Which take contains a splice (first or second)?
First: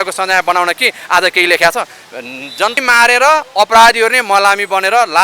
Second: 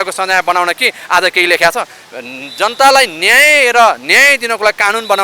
first